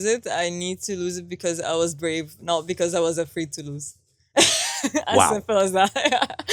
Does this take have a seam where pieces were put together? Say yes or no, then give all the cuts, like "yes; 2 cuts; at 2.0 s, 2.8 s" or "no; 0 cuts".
no; 0 cuts